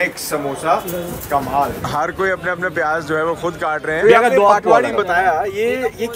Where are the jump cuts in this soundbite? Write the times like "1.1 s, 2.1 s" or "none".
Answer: 1.8 s, 4.0 s